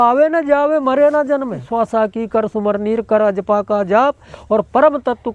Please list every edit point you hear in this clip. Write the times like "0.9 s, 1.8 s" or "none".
1.6 s